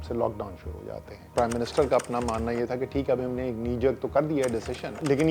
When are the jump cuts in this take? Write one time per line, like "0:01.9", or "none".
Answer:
none